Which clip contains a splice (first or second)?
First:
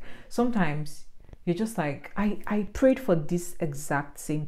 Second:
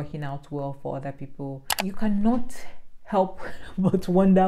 second